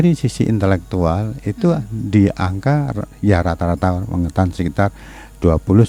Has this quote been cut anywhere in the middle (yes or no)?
no